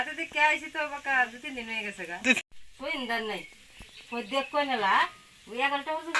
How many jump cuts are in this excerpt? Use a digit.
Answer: 1